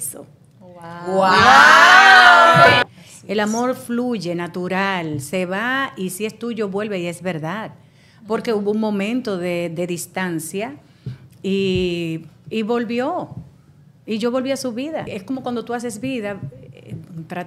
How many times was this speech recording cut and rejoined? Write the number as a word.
two